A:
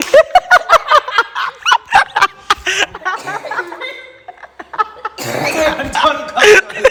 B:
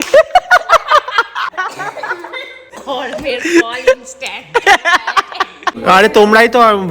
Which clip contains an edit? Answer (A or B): B